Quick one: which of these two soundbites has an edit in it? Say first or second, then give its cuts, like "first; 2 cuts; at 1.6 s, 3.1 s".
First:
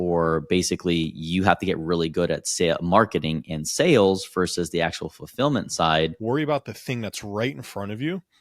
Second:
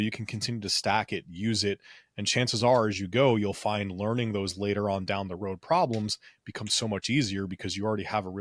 first; 1 cut; at 6.2 s